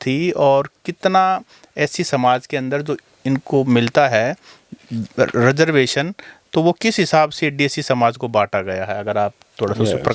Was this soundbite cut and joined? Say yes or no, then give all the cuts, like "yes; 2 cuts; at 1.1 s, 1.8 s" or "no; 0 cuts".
no; 0 cuts